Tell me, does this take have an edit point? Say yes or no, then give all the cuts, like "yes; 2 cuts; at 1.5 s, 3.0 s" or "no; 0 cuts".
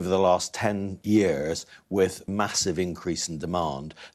yes; 2 cuts; at 0.9 s, 2.3 s